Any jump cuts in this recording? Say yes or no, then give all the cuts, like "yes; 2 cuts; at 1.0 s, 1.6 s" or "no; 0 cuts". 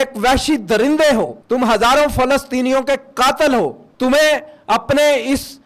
yes; 2 cuts; at 1.4 s, 3.8 s